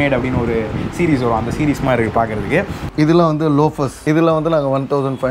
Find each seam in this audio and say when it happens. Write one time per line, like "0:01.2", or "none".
0:02.8
0:04.0